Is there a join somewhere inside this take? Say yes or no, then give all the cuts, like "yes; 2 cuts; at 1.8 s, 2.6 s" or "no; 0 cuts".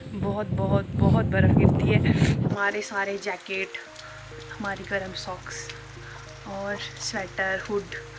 yes; 1 cut; at 2.5 s